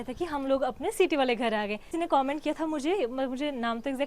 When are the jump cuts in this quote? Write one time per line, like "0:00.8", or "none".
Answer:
0:01.9